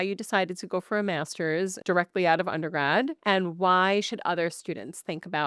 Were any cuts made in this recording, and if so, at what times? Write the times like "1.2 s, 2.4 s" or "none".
1.8 s, 3.2 s